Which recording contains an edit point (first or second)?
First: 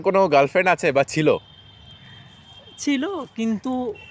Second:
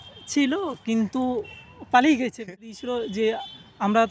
second